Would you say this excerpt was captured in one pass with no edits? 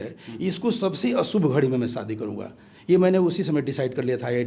yes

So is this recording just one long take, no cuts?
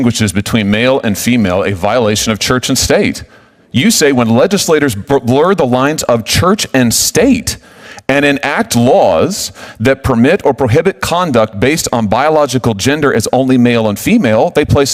yes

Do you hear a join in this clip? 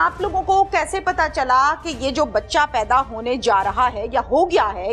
no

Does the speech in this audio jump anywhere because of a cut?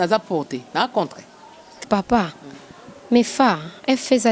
yes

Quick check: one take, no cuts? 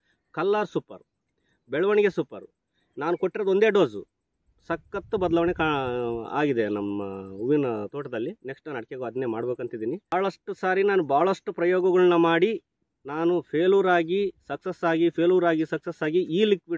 no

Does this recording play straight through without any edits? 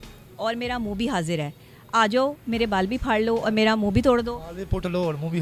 yes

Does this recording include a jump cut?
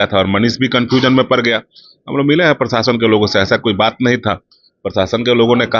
no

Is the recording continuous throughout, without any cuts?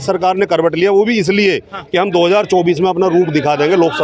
yes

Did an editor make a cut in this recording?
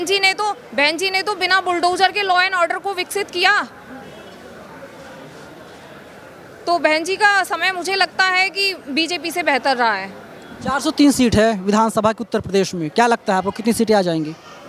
no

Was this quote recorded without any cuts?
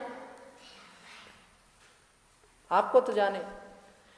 yes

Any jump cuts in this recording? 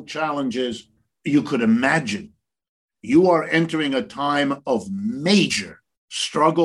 yes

